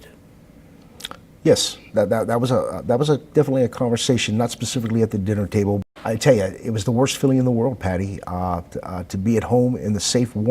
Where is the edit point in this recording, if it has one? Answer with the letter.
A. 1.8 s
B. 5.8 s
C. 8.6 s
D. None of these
B